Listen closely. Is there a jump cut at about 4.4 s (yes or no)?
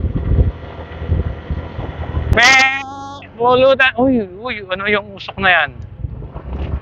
no